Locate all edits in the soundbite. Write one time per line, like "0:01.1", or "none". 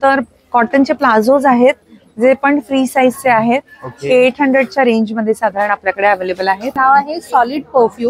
0:06.7